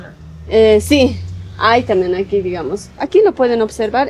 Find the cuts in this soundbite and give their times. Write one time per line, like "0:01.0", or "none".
0:03.0